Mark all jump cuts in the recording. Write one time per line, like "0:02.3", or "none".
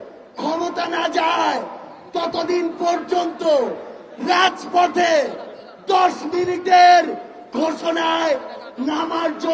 none